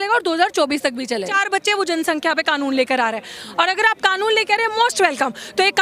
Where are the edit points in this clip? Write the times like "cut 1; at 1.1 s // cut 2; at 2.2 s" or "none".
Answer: cut 1; at 1.3 s